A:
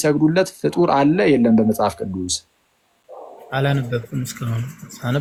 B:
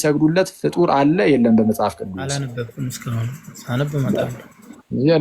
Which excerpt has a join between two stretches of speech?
B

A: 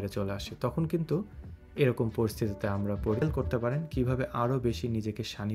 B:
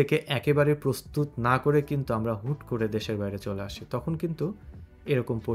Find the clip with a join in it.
A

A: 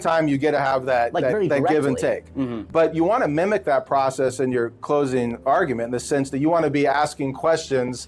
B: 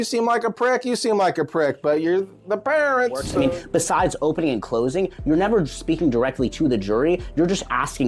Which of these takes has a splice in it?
B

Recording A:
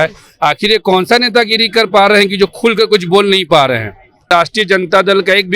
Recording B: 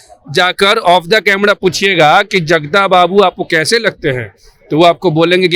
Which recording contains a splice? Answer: A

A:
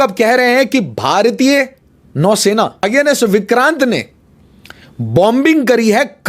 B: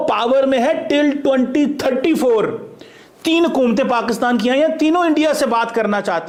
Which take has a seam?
A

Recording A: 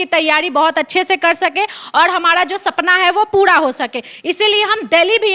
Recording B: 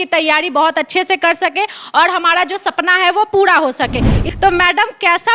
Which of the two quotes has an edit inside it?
B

